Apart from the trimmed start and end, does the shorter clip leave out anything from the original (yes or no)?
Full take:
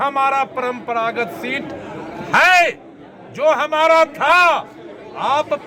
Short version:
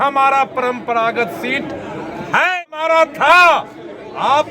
yes